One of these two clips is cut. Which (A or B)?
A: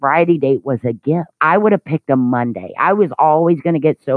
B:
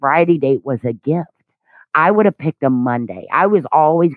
A